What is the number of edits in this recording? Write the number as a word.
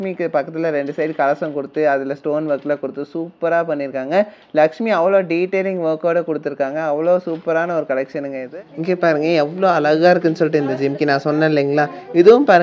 one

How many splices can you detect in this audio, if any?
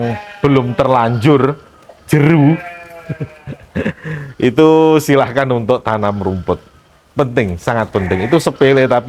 zero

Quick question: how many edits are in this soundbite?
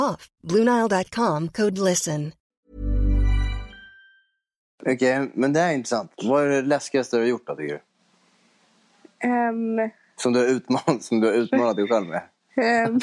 two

